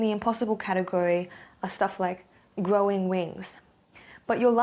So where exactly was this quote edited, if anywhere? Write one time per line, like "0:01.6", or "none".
none